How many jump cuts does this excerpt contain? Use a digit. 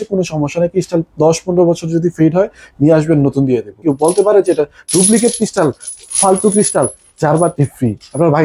1